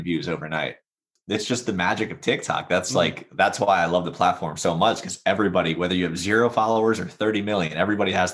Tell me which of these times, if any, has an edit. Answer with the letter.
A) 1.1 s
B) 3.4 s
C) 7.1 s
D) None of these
A